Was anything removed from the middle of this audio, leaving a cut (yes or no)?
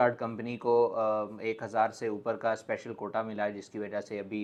no